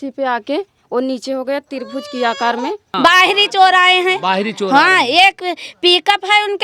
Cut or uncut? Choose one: cut